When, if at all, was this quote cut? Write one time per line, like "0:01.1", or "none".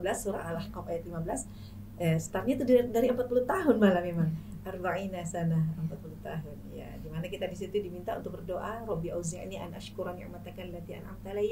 none

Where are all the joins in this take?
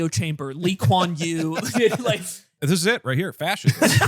0:02.5

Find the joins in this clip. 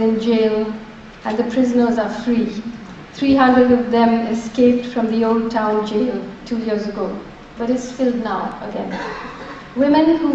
0:02.3

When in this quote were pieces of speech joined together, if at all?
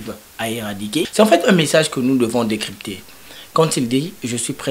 0:01.1

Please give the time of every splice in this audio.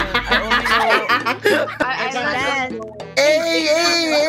0:01.8

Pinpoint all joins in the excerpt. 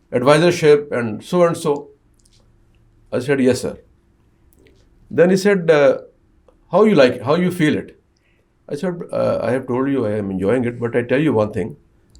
none

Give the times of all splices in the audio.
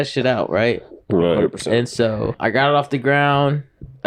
0:02.4

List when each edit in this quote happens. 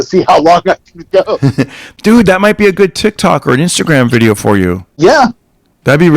0:01.8
0:04.9

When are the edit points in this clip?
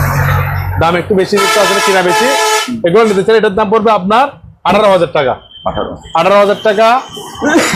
none

